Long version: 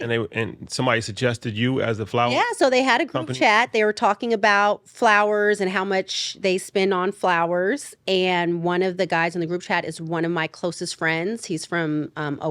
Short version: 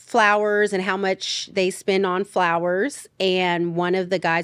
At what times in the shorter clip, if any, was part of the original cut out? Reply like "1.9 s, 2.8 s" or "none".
none